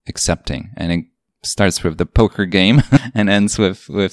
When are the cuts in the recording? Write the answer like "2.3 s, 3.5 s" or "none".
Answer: none